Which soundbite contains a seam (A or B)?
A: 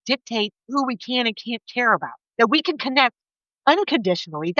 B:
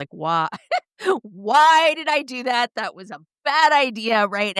A